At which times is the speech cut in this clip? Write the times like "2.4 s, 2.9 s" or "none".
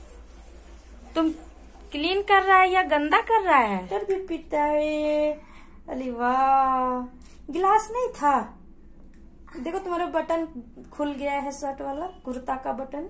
3.9 s

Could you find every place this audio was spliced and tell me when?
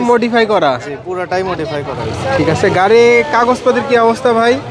none

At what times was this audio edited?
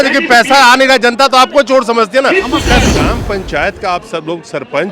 3.0 s

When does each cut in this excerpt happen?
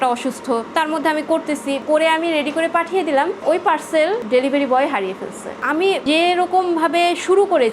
1.8 s, 5.5 s

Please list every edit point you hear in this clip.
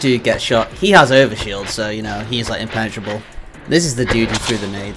none

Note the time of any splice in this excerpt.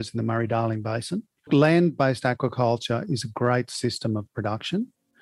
1.5 s

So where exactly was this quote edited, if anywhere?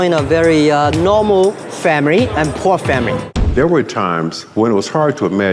3.5 s

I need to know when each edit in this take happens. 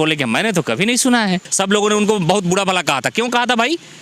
1.5 s

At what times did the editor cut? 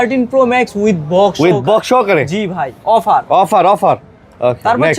none

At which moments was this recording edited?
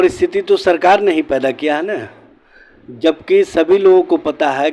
none

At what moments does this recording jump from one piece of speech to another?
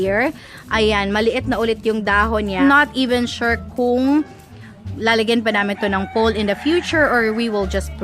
2.6 s

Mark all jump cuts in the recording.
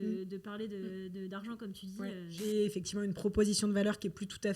2.4 s

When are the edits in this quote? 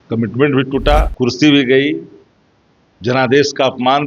1.1 s

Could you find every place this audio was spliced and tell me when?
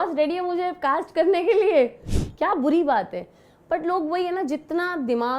2.1 s

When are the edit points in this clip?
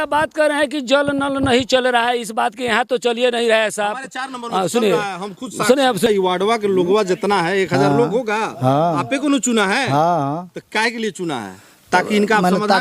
6.1 s

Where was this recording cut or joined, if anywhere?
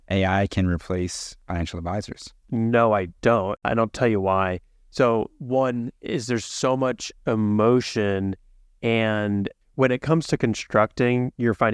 2.5 s, 3.5 s

